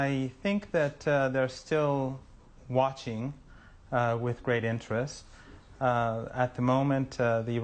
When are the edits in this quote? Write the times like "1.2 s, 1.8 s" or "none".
4.0 s